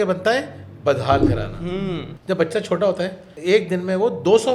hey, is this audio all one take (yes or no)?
no